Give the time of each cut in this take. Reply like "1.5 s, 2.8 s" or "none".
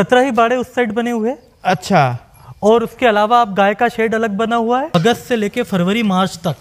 4.9 s

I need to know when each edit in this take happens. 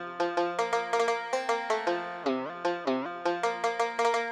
none

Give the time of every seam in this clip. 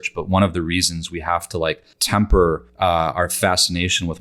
1.9 s, 2.7 s

